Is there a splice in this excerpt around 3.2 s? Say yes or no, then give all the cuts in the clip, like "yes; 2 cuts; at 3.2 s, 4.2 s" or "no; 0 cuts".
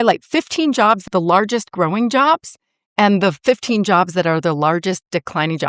no; 1 cut; at 1.0 s